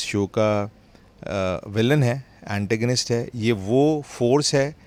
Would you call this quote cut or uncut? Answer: uncut